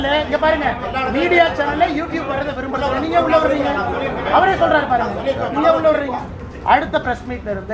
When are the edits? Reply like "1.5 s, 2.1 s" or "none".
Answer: 6.4 s